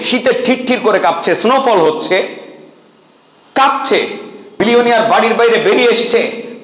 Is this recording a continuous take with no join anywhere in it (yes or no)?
no